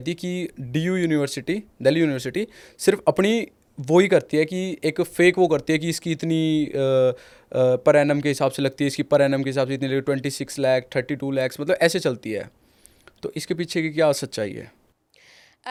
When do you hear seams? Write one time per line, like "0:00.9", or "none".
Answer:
none